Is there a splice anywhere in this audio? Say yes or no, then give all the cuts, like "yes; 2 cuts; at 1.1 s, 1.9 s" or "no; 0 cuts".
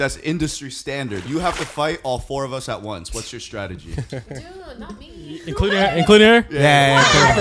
yes; 1 cut; at 1.2 s